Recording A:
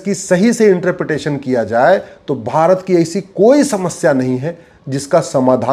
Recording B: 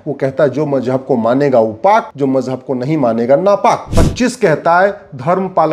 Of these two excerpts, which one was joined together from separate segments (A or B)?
B